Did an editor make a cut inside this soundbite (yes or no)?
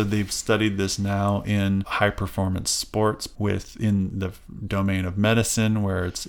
yes